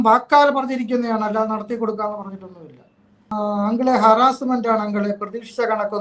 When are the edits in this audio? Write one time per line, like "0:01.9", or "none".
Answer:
0:03.3